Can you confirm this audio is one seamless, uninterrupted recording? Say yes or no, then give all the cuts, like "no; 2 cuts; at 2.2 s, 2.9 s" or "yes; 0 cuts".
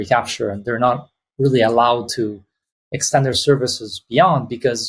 yes; 0 cuts